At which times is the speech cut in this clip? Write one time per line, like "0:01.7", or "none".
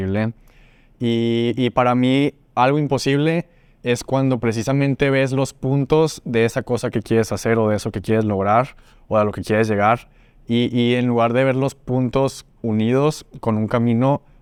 none

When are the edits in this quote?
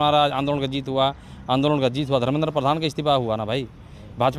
none

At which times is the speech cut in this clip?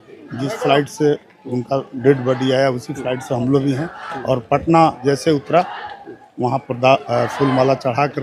none

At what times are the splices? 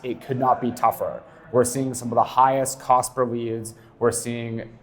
none

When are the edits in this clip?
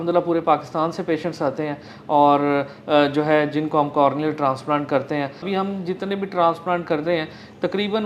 0:05.5

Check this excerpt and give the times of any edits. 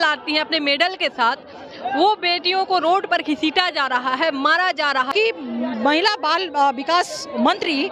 0:05.1

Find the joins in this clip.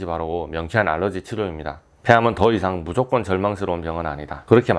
0:01.9

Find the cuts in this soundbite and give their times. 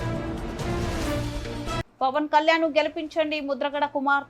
0:01.9

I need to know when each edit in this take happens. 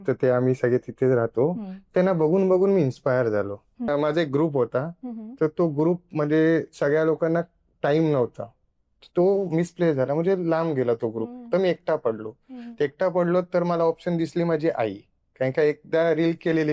0:03.9

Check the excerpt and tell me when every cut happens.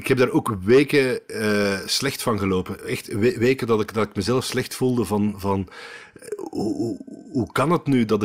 none

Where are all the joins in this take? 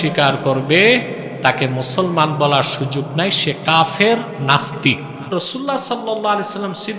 0:05.3

